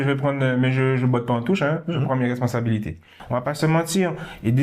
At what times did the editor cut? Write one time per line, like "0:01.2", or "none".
0:03.1